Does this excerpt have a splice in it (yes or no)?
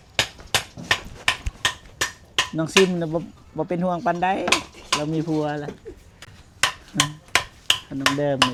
no